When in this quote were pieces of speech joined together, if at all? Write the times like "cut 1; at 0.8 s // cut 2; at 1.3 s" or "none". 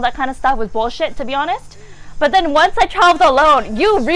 none